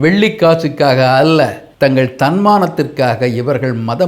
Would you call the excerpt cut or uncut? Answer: cut